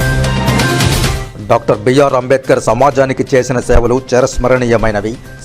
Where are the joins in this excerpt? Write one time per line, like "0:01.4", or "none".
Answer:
0:01.2